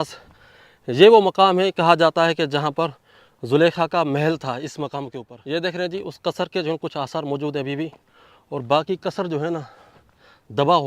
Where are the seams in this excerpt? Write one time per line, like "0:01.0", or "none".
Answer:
0:05.3

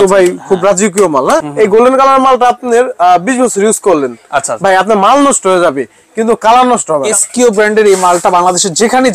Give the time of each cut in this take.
0:01.4
0:07.1

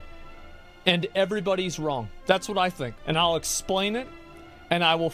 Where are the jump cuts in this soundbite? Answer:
0:02.1
0:03.0

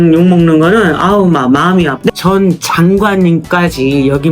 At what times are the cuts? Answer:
0:02.1

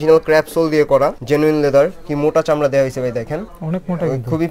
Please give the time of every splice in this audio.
0:01.2
0:03.5

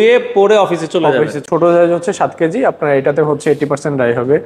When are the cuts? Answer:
0:01.4

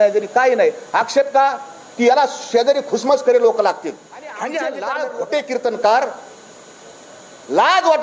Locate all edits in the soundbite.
0:04.8

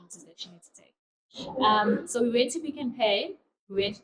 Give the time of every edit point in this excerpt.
none

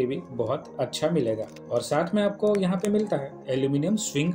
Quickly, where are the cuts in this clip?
none

